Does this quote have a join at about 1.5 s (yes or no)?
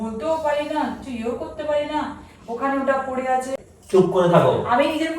no